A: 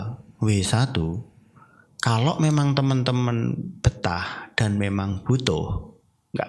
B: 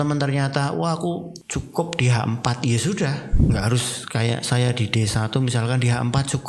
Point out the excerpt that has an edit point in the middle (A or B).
B